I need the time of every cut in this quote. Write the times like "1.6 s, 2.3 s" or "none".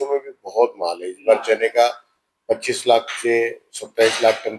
none